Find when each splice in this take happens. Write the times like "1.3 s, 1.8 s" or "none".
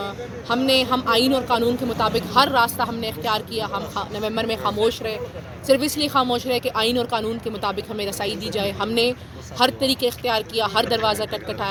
none